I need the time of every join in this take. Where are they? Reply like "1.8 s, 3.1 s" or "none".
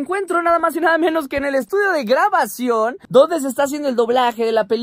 none

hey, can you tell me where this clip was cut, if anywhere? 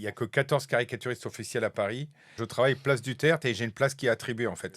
2.4 s

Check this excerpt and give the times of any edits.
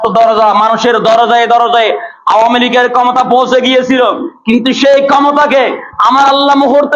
none

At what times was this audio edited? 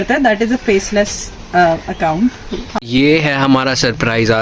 2.6 s

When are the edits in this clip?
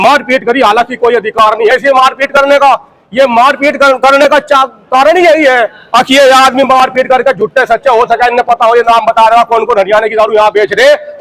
none

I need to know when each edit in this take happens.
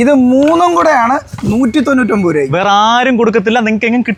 none

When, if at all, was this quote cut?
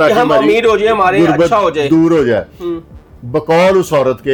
none

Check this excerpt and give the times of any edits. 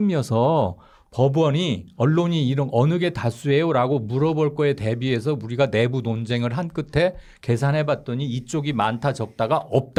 none

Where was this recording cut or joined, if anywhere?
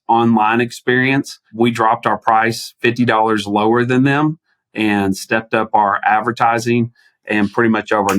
1.4 s

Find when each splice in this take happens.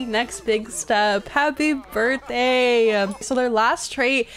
3.2 s

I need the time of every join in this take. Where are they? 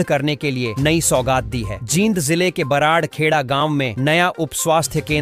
none

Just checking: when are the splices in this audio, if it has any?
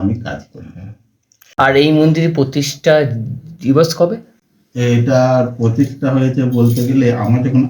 1.2 s

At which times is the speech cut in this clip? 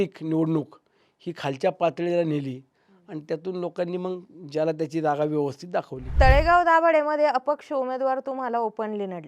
6.0 s

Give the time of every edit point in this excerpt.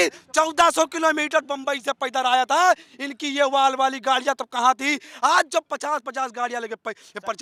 none

